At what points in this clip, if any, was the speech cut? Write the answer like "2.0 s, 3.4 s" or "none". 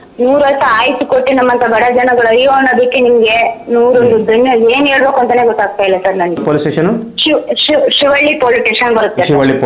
6.4 s